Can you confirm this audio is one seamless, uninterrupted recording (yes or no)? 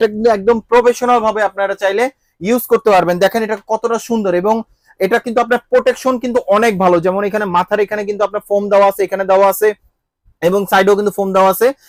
yes